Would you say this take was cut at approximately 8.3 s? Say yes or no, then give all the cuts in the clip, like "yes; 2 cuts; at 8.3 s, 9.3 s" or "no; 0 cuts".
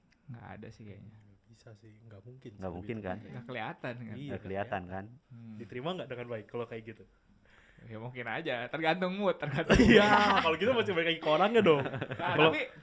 no; 1 cut; at 5.2 s